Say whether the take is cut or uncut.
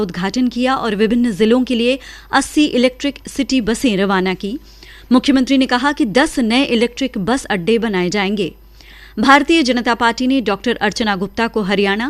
uncut